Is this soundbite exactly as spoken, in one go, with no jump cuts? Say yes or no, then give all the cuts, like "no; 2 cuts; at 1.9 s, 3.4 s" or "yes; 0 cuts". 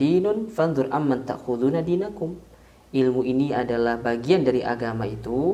yes; 0 cuts